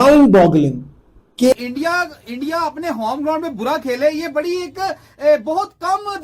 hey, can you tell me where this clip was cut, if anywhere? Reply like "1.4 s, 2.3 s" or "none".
1.5 s

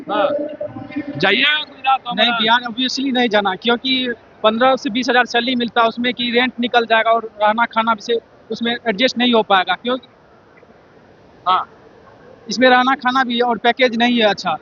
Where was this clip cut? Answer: none

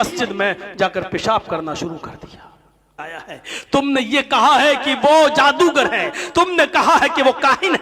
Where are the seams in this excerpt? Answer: 2.9 s

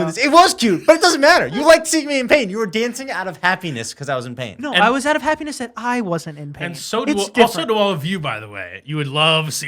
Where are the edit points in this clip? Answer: none

